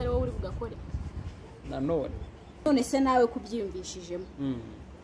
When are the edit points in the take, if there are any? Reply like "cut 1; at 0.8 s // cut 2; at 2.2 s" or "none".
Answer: cut 1; at 2.7 s